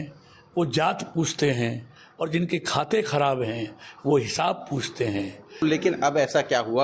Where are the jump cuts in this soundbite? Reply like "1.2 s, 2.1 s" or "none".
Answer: 5.6 s